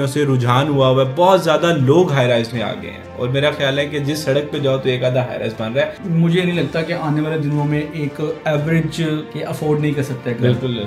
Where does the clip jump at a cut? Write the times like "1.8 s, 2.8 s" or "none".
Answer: 6.0 s, 9.3 s